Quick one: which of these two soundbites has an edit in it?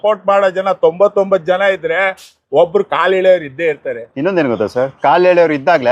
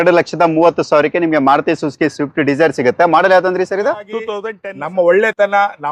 second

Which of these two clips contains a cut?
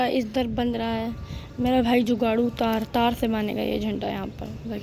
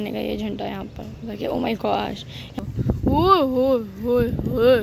second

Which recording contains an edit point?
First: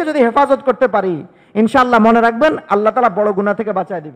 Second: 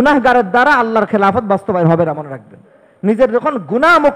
second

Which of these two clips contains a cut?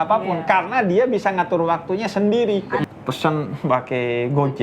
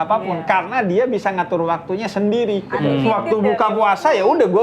first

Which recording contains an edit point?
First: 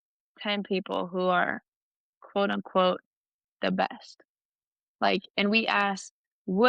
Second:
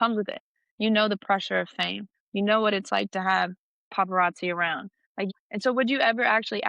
second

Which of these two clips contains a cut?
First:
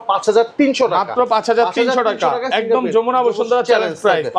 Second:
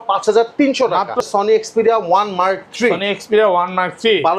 second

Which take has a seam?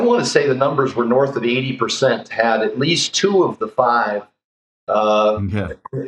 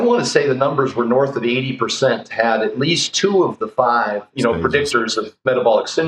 second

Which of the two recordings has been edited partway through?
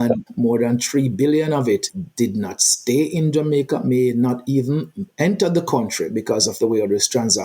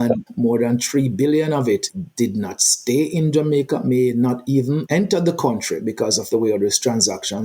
second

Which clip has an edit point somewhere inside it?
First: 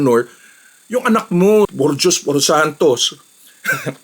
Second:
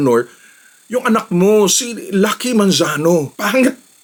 first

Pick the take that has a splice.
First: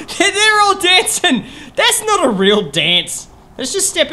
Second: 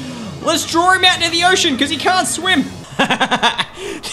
second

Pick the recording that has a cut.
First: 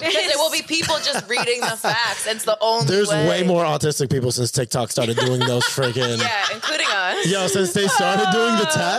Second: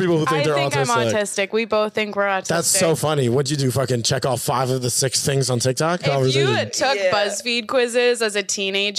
second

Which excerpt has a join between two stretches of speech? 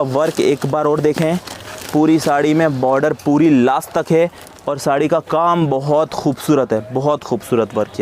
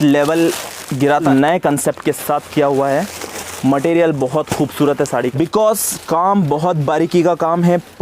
second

